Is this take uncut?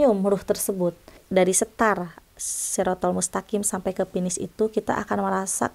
no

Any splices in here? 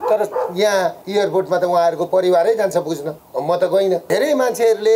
yes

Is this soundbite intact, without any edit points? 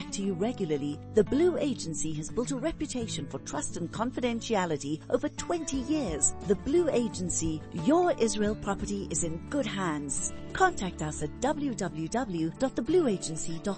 yes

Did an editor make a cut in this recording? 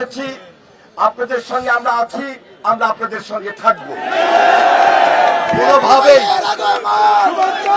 no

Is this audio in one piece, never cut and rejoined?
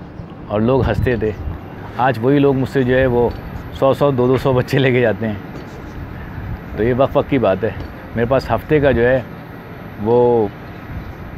yes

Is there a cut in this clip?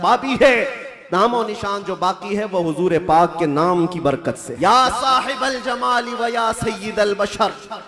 yes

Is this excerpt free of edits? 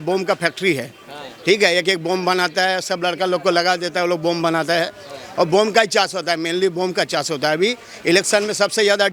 yes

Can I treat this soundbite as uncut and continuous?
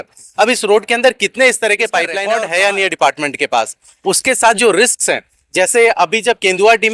no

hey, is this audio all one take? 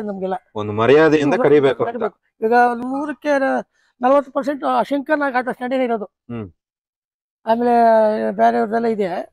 yes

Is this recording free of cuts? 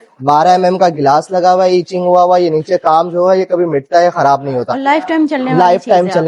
yes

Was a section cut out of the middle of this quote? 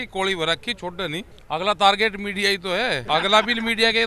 yes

